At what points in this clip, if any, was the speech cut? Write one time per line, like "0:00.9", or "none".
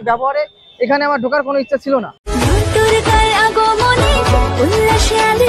0:02.2